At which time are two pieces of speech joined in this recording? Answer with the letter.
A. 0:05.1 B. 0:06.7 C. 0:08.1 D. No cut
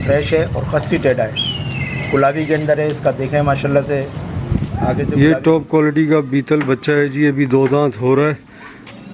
A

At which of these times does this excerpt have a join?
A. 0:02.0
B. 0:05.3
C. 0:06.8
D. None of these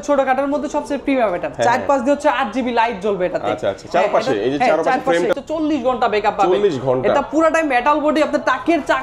B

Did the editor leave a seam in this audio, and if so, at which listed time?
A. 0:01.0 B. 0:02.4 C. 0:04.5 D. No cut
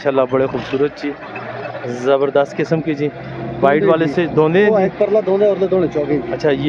D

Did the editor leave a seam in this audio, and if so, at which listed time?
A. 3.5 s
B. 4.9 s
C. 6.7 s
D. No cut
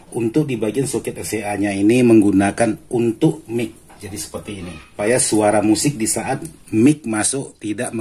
B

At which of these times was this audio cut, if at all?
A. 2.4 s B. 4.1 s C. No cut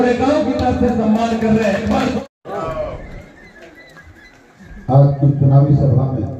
A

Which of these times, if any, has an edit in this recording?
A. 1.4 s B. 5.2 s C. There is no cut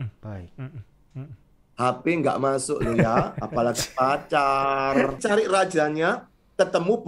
B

